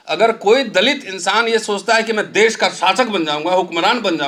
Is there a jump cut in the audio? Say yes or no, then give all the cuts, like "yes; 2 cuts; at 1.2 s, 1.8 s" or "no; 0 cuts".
no; 0 cuts